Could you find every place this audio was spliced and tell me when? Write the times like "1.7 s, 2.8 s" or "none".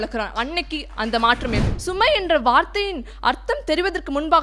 1.7 s

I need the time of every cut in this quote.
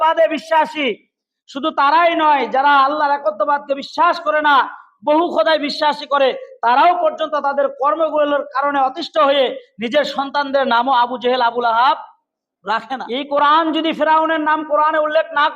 13.0 s

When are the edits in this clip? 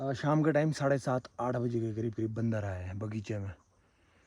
none

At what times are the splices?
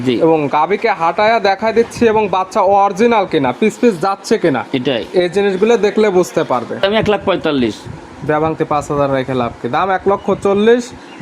6.8 s

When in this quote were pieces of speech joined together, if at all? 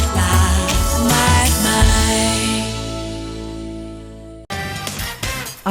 4.3 s

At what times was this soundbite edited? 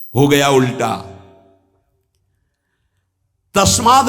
none

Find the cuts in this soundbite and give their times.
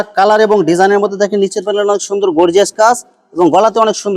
none

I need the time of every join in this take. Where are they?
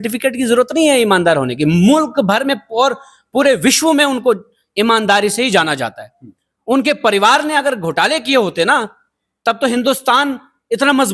none

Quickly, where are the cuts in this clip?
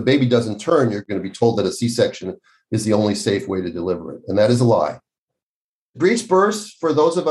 1.0 s, 5.8 s

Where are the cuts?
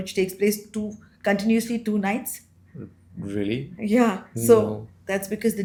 none

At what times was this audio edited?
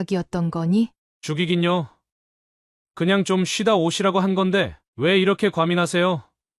1.1 s

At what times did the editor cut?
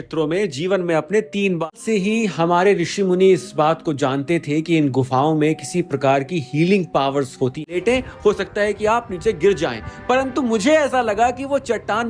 1.8 s, 7.7 s

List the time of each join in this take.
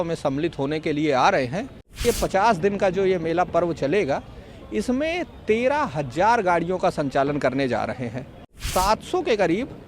2.0 s, 8.6 s

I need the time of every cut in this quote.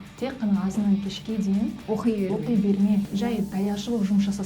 3.1 s

